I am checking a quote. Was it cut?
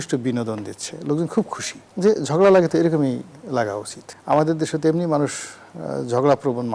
no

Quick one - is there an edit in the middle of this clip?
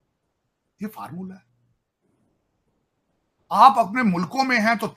no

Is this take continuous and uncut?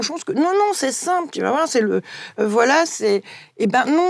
yes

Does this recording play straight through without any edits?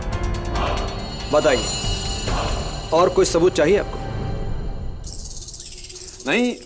yes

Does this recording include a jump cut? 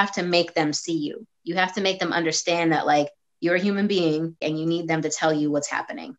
yes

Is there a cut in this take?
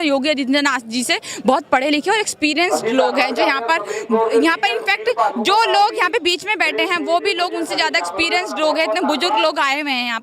no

